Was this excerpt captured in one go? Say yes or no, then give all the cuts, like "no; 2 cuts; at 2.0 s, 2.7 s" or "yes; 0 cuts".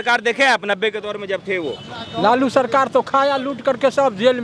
yes; 0 cuts